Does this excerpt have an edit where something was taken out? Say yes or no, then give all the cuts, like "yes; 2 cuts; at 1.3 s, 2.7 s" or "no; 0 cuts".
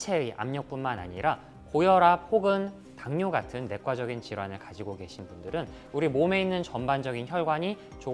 no; 0 cuts